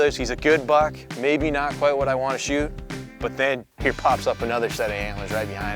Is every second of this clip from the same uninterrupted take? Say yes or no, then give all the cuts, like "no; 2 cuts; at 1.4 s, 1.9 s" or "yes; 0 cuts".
no; 1 cut; at 3.7 s